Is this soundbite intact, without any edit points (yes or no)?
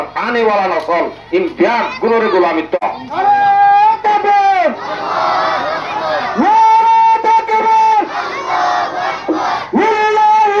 no